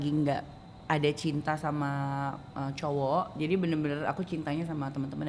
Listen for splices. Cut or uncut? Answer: uncut